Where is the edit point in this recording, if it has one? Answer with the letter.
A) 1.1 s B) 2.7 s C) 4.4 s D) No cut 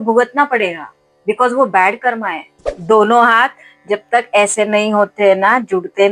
B